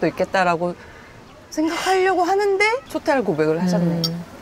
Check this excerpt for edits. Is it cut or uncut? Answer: cut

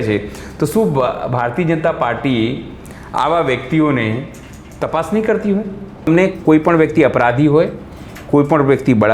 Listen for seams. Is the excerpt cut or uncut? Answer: cut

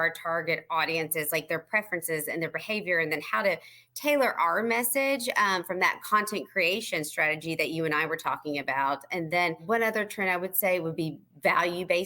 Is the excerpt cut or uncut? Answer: cut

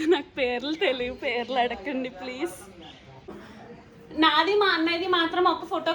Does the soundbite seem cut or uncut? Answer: cut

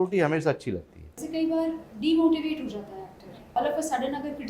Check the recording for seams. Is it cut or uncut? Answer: cut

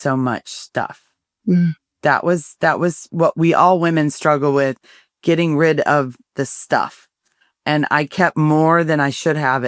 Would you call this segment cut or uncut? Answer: uncut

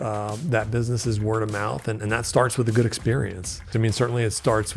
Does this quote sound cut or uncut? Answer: cut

